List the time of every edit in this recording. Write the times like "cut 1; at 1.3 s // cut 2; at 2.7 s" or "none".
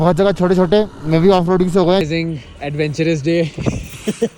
cut 1; at 2.0 s